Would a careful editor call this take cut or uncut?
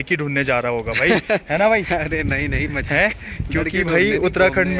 uncut